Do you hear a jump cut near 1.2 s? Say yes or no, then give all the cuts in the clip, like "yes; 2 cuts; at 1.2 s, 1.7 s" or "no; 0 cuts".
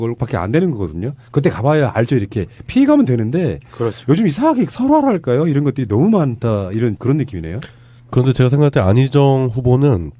yes; 1 cut; at 1.2 s